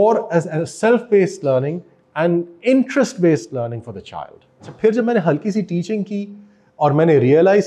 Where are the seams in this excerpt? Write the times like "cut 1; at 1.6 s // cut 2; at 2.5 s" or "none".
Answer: cut 1; at 4.7 s